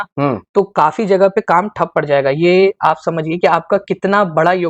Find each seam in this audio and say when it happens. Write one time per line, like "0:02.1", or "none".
none